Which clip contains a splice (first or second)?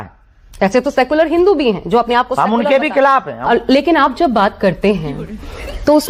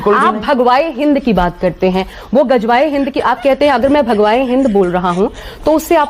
first